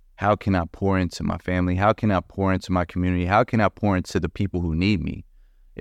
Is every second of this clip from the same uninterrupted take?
yes; 0 cuts

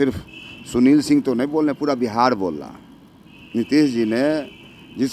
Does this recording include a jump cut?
no; 0 cuts

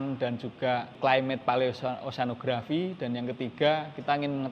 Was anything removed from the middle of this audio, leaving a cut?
yes; 1 cut; at 0.9 s

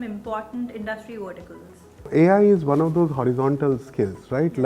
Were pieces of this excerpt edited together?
yes; 1 cut; at 2.1 s

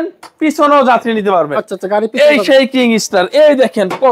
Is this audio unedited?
yes; 0 cuts

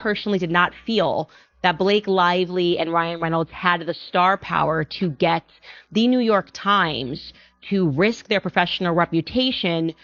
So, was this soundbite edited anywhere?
no; 0 cuts

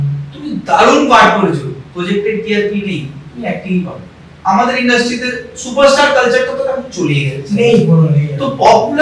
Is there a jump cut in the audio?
yes; 1 cut; at 4.3 s

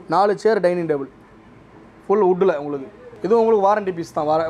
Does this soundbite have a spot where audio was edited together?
no; 0 cuts

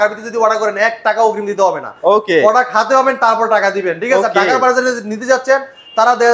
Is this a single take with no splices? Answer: yes; 0 cuts

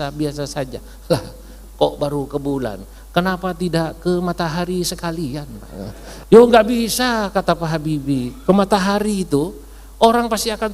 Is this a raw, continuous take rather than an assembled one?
no; 1 cut; at 6.1 s

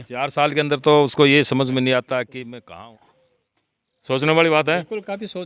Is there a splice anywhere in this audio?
yes; 1 cut; at 2.8 s

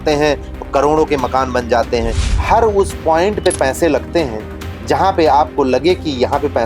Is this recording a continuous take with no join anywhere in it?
no; 1 cut; at 2.2 s

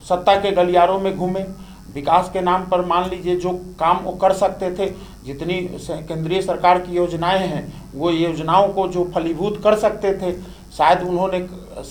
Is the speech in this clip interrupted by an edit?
no; 0 cuts

